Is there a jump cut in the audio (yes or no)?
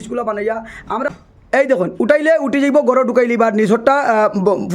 yes